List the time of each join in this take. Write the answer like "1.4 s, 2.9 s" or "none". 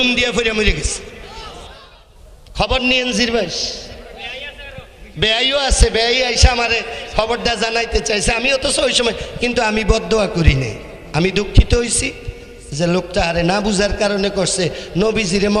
1.9 s